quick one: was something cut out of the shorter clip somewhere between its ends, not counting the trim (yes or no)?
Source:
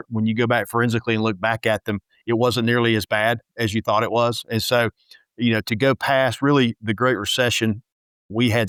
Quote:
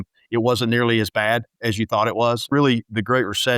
yes